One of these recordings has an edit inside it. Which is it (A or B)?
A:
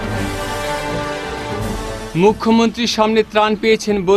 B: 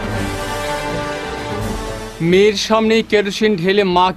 A